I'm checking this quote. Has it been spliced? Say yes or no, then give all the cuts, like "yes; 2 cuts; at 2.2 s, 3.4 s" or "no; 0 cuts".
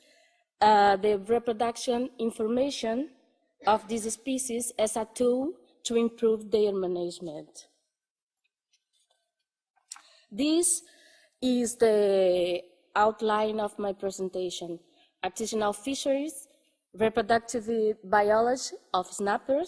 no; 0 cuts